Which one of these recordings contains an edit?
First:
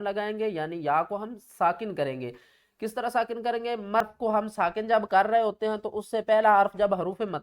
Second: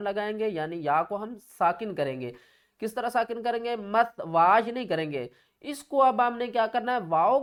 first; 1 cut; at 4.0 s

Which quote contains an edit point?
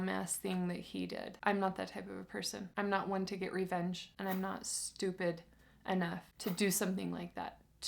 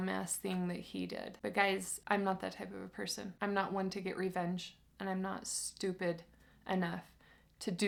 first; 3 cuts; at 1.3 s, 4.1 s, 6.3 s

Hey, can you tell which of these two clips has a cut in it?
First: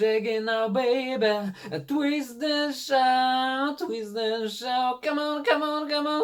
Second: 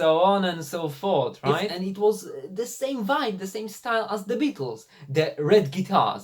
second; 1 cut; at 1.6 s

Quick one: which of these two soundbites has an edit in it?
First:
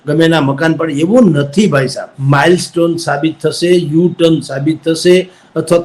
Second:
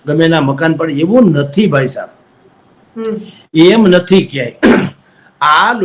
first; 1 cut; at 2.1 s

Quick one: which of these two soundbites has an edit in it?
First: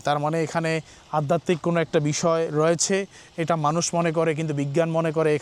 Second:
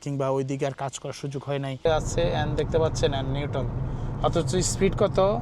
second; 1 cut; at 1.9 s

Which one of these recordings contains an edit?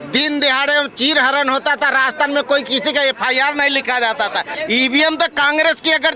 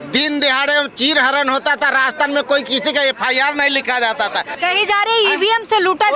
first; 1 cut; at 4.5 s

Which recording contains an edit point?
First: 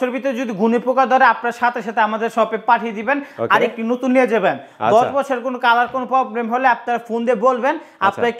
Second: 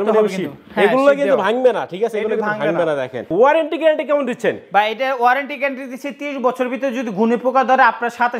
second; 1 cut; at 3.3 s

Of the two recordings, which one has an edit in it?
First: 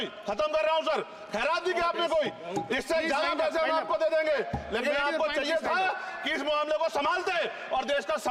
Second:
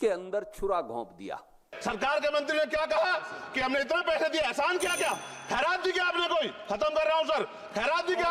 second; 1 cut; at 1.7 s

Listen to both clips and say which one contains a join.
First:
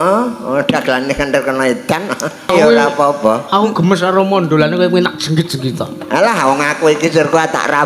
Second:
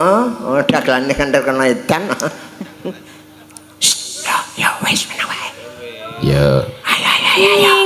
first; 1 cut; at 2.5 s

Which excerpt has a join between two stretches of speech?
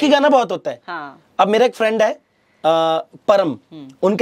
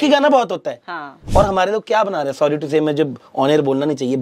second; 1 cut; at 1.1 s

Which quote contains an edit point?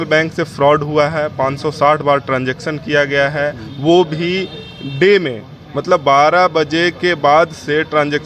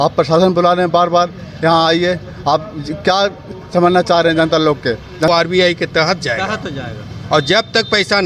second; 1 cut; at 5.3 s

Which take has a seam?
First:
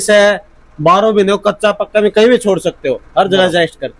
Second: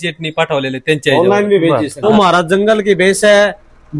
second; 1 cut; at 2.0 s

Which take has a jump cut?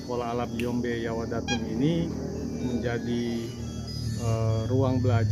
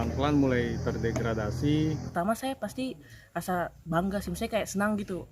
second; 1 cut; at 2.0 s

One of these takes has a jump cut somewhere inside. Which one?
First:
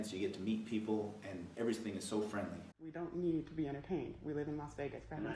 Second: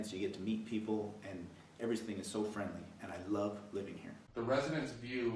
first; 2 cuts; at 1.4 s, 2.8 s

